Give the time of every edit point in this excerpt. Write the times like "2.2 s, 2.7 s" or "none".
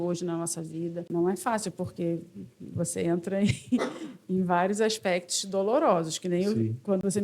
1.1 s